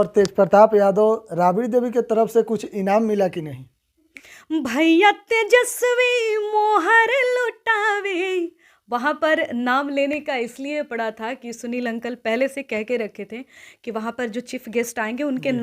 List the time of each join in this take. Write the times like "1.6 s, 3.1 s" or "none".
4.2 s